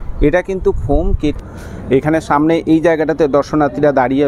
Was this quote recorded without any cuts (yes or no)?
no